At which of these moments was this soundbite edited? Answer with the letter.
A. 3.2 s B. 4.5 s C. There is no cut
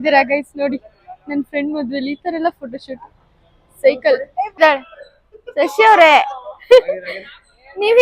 B